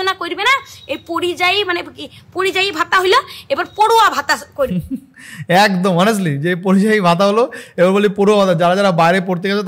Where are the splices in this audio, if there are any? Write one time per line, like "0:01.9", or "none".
none